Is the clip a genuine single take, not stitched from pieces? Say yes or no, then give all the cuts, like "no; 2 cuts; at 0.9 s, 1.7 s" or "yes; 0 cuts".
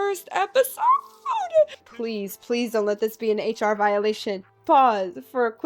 no; 2 cuts; at 1.9 s, 4.5 s